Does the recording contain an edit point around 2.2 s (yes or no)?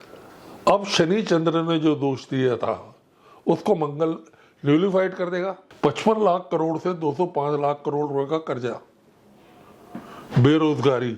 no